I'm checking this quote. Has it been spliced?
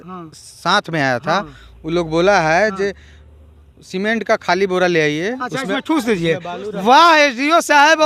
no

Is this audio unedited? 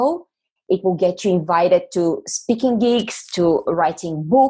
yes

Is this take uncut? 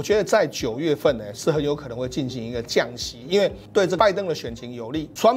no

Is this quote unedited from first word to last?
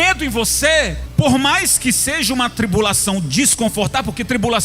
no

